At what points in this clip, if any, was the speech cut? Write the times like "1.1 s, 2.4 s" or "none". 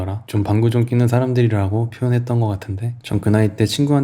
2.9 s